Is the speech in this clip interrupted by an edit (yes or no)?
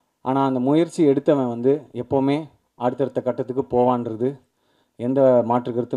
no